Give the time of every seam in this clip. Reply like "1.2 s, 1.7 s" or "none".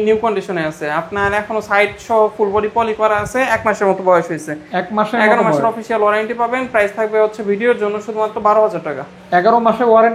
none